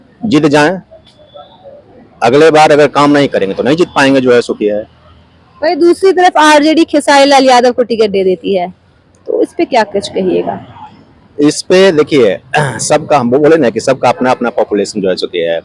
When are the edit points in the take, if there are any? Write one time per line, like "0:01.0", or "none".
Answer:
none